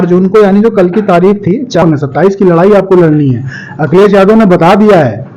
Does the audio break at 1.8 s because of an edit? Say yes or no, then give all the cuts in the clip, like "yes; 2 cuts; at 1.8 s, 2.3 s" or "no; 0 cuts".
yes; 1 cut; at 1.8 s